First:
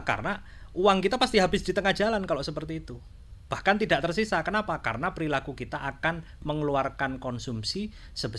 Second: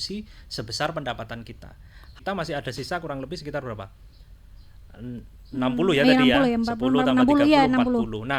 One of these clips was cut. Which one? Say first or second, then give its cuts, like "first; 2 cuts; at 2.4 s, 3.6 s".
second; 1 cut; at 2.1 s